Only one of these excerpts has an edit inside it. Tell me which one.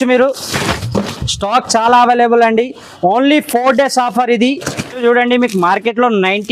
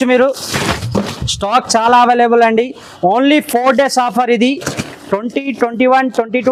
first; 1 cut; at 4.9 s

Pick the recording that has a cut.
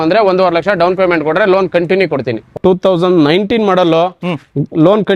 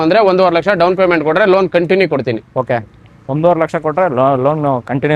first; 1 cut; at 2.6 s

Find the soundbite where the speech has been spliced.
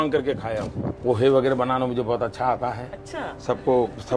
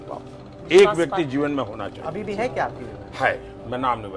first; 1 cut; at 1.0 s

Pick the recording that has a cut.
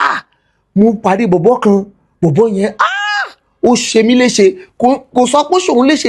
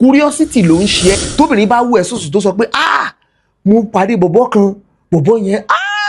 second; 1 cut; at 1.2 s

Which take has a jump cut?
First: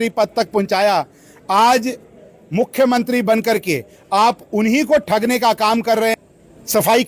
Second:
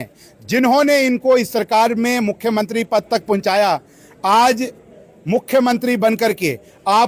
first; 1 cut; at 6.1 s

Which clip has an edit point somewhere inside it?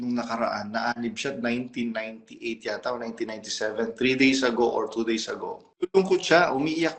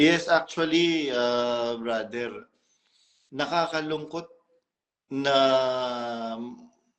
first; 1 cut; at 5.7 s

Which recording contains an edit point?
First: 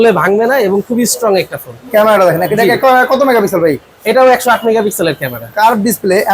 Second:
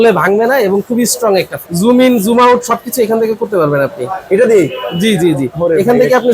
second; 1 cut; at 1.6 s

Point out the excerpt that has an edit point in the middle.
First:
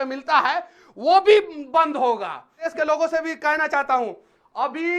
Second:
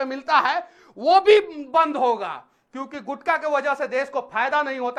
first; 1 cut; at 2.7 s

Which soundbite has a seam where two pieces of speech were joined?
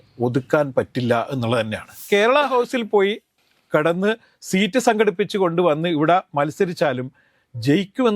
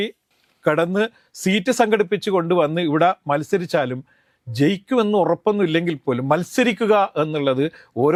first; 1 cut; at 2.0 s

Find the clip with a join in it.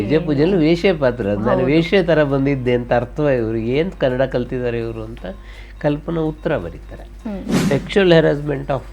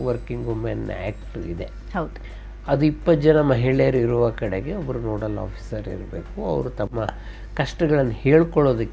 first; 1 cut; at 7.6 s

